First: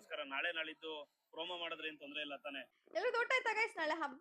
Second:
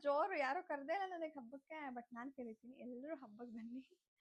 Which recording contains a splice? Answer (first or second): first